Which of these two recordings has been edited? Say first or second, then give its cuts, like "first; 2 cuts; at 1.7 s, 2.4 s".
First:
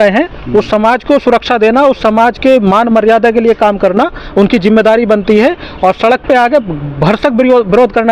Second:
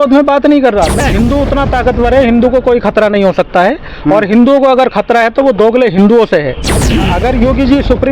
second; 2 cuts; at 0.9 s, 6.9 s